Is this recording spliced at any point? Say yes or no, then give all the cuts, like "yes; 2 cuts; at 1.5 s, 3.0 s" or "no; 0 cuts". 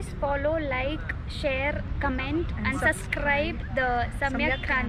no; 0 cuts